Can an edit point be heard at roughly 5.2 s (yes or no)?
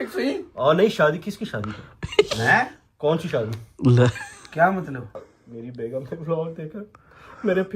yes